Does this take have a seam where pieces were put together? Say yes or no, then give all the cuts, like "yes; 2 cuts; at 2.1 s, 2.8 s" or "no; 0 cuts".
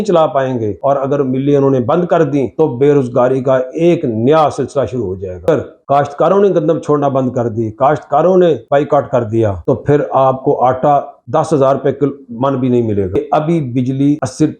yes; 2 cuts; at 5.5 s, 13.2 s